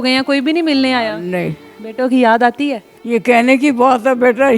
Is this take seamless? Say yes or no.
no